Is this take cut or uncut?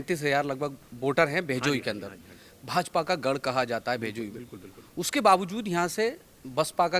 uncut